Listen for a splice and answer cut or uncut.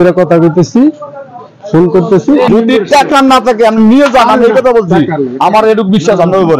cut